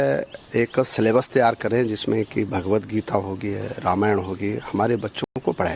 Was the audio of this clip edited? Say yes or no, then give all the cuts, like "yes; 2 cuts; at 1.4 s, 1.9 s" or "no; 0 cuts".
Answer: no; 0 cuts